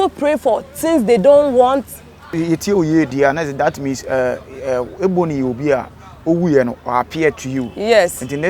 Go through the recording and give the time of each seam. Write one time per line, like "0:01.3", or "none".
0:02.3